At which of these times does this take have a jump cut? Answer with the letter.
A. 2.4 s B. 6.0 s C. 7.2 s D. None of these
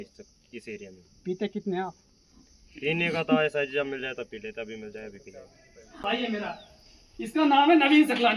B